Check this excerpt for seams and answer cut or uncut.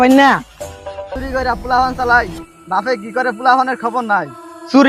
cut